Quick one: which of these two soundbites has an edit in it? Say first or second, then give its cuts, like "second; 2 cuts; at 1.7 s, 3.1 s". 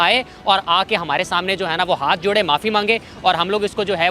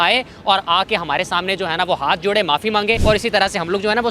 second; 1 cut; at 3.0 s